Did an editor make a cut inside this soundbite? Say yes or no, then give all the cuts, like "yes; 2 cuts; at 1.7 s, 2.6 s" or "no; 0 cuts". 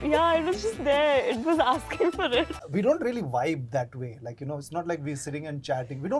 yes; 1 cut; at 2.6 s